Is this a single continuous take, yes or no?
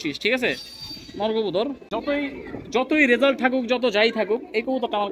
no